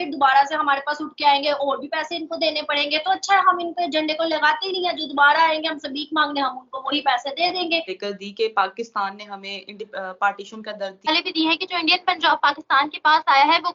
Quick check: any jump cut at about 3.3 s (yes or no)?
no